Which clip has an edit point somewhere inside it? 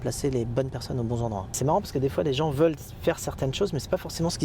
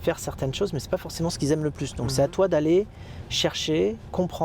first; 1 cut; at 1.5 s

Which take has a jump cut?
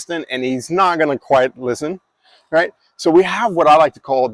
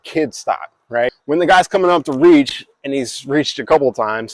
second; 1 cut; at 1.2 s

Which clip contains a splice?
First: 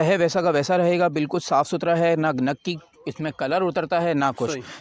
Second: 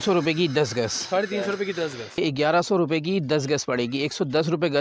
second; 1 cut; at 2.2 s

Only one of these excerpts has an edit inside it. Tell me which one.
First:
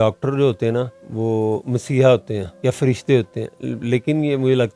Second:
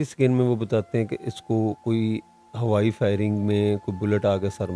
first; 2 cuts; at 1.0 s, 2.5 s

